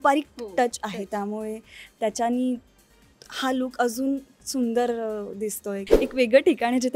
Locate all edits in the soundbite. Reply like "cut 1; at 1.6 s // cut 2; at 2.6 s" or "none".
cut 1; at 5.9 s